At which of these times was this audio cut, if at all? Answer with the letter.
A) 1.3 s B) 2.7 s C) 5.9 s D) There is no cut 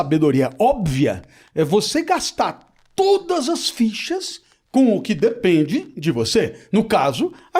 D